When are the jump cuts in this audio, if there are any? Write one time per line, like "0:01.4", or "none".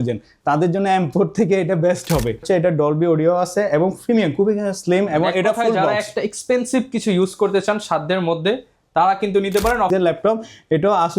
0:02.4
0:09.9